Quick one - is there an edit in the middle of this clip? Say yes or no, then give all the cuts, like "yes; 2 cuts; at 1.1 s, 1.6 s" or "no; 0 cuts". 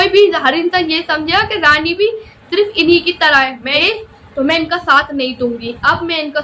yes; 1 cut; at 3.8 s